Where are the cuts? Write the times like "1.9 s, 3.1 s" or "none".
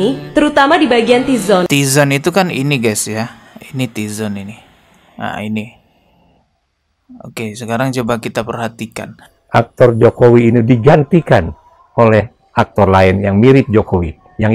1.7 s, 9.4 s